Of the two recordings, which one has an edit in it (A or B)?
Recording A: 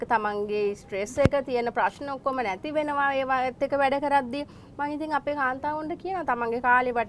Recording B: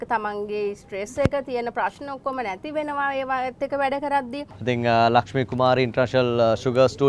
B